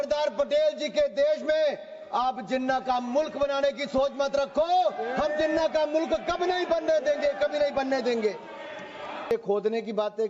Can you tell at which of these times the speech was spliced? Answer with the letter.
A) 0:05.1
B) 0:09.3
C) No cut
B